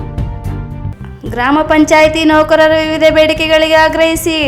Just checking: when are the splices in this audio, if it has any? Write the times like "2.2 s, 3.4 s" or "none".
0.9 s